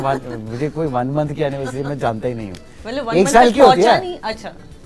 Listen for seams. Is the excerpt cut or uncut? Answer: uncut